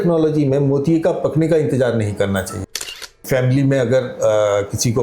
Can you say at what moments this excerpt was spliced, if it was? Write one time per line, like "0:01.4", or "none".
0:02.9